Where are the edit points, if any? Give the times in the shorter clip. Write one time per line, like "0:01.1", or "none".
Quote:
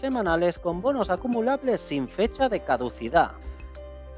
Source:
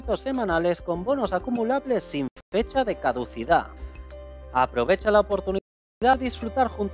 0:02.1